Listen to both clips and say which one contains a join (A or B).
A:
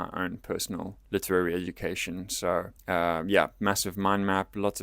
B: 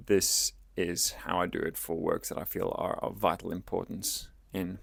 A